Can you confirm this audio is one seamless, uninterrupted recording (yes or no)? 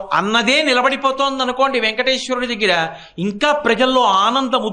yes